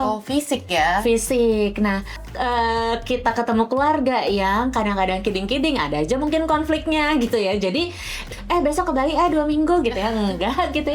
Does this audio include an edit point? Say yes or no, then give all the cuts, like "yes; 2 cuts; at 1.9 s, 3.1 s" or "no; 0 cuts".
yes; 2 cuts; at 2.2 s, 8.2 s